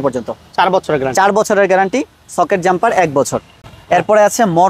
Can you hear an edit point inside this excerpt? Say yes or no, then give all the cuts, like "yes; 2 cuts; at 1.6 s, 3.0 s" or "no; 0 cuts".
no; 0 cuts